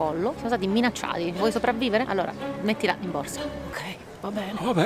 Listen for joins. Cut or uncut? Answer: cut